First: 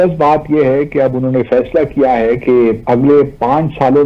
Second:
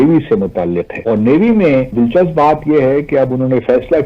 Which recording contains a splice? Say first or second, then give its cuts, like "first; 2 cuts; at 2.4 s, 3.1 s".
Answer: second; 1 cut; at 1.0 s